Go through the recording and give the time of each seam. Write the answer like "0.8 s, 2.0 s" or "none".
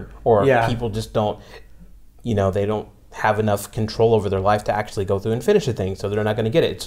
none